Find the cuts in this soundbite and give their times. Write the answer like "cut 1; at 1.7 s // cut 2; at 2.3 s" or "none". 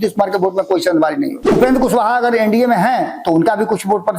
cut 1; at 1.5 s